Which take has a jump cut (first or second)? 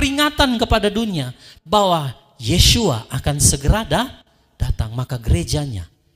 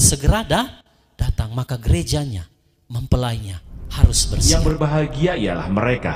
second